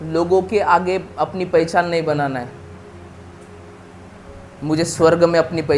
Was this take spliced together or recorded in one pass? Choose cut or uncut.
uncut